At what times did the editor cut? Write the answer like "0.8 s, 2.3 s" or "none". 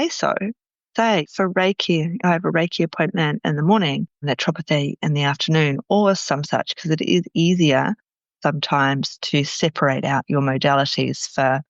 1.3 s